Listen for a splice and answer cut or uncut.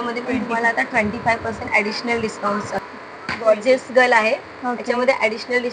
uncut